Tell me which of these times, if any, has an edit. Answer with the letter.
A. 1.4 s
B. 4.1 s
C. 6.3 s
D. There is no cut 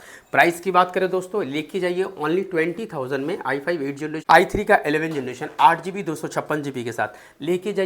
B